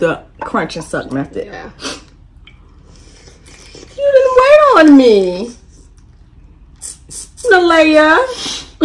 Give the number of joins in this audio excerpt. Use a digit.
0